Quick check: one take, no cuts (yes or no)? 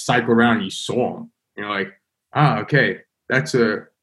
yes